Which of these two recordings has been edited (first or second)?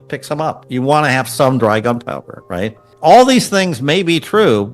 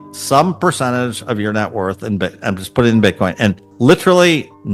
first